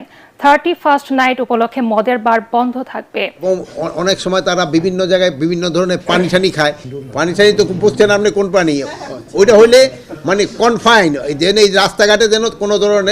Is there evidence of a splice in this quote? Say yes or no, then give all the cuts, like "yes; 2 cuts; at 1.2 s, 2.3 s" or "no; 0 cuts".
yes; 1 cut; at 3.4 s